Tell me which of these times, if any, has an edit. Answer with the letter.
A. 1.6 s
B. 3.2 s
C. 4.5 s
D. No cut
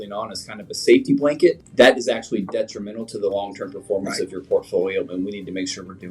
A